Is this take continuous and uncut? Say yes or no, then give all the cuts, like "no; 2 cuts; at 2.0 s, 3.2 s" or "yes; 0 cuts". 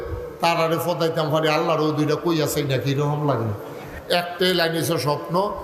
no; 1 cut; at 3.9 s